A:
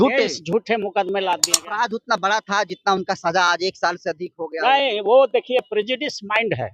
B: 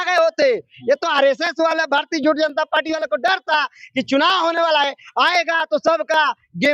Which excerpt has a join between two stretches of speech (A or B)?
A